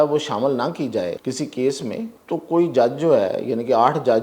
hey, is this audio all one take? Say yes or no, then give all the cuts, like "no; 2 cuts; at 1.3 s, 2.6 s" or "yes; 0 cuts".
no; 2 cuts; at 1.2 s, 2.2 s